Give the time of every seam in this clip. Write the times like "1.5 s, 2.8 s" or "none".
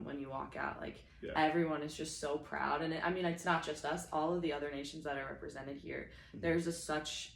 3.6 s